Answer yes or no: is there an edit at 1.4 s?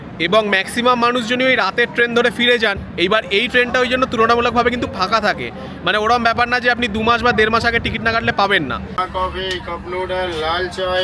no